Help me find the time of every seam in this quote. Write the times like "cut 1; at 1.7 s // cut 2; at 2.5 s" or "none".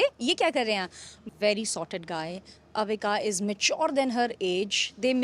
cut 1; at 1.2 s